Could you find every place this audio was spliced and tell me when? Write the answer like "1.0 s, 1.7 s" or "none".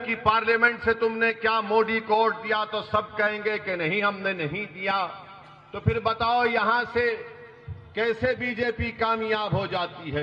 none